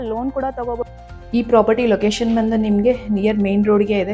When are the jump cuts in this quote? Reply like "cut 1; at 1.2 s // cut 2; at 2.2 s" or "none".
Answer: cut 1; at 1.3 s